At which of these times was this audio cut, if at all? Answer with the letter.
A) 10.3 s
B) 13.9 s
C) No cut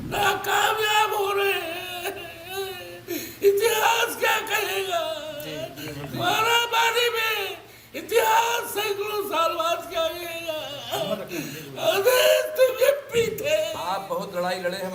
C